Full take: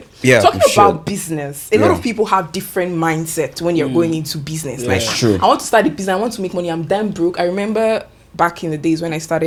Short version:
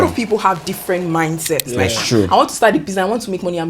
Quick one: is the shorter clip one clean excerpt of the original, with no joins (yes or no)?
no